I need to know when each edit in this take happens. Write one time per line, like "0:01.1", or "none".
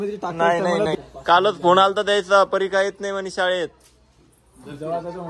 0:00.9

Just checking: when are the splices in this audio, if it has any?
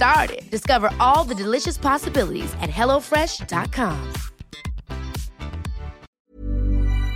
0:06.1

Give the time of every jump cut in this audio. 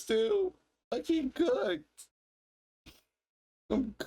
0:00.9

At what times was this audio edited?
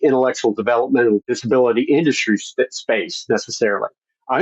0:01.2

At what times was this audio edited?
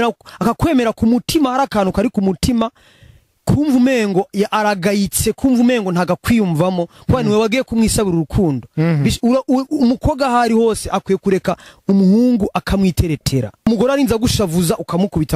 0:13.6

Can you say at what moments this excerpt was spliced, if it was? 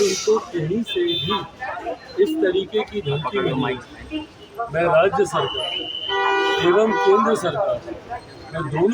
none

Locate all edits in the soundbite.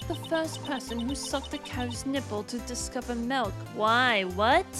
none

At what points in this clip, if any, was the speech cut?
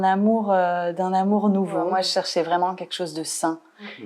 0:01.9

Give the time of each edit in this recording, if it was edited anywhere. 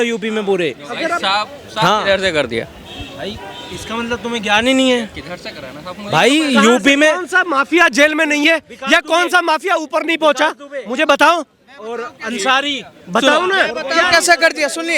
none

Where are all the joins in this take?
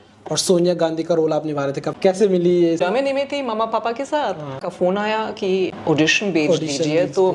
0:01.9
0:02.8
0:04.7
0:05.8

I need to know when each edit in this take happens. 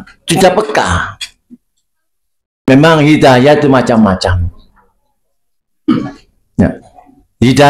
0:02.7

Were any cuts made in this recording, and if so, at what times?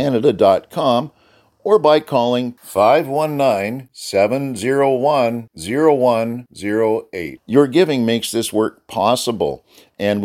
none

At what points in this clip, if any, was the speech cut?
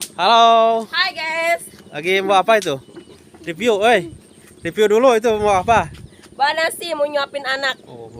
none

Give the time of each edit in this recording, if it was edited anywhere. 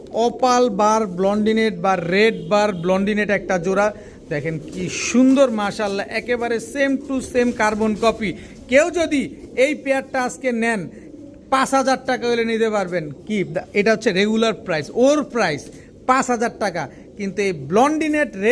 none

